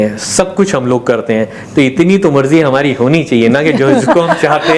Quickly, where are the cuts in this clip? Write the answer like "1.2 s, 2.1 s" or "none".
none